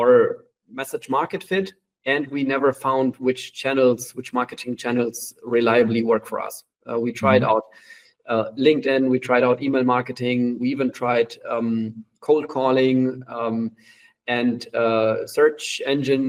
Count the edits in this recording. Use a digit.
0